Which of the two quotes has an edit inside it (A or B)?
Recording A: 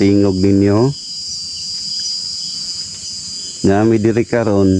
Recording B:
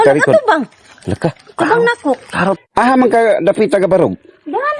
B